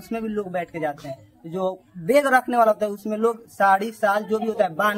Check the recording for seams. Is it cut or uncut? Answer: uncut